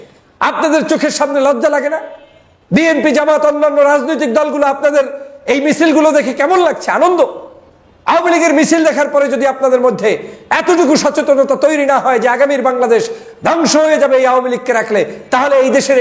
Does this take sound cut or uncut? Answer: uncut